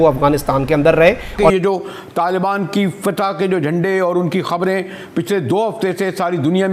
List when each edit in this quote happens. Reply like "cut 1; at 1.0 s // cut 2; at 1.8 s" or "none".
cut 1; at 1.5 s